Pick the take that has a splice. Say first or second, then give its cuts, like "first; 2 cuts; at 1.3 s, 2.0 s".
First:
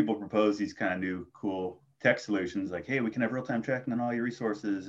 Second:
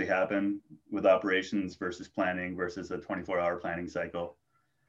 first; 1 cut; at 1.9 s